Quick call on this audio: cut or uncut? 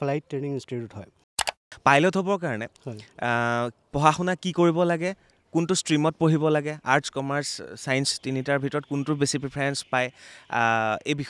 cut